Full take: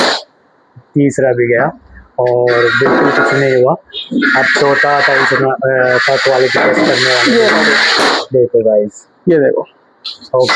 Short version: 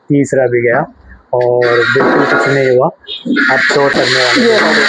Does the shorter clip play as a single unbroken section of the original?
no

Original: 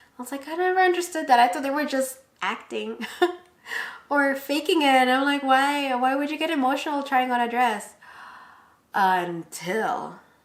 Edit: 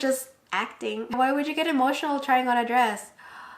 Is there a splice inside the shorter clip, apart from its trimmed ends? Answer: yes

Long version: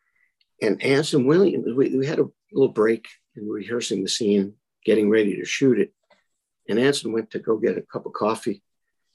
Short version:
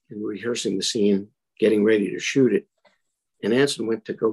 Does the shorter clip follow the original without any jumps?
yes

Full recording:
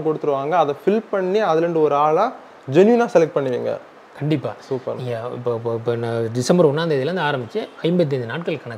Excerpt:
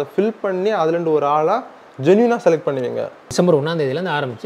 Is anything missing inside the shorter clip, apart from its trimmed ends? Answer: yes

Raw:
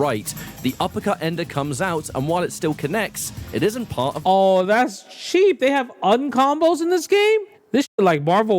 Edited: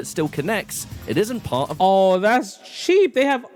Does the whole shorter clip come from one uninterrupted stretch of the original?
yes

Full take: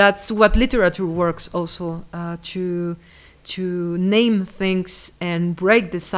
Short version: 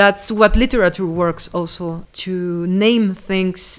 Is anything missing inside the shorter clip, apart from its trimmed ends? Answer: yes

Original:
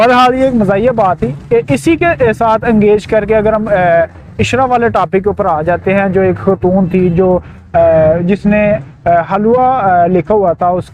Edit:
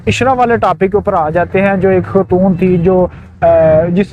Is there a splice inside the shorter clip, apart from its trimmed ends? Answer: no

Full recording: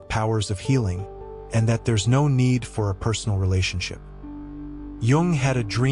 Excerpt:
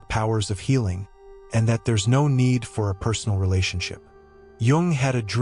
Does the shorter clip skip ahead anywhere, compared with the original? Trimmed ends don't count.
yes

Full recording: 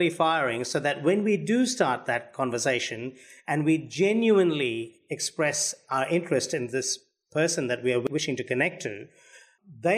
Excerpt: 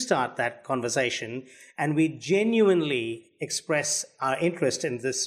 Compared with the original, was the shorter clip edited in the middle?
no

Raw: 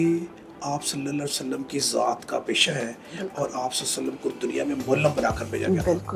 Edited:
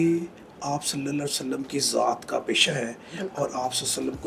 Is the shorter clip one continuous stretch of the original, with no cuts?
yes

